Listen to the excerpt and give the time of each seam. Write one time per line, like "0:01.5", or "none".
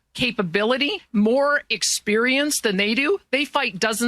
0:01.0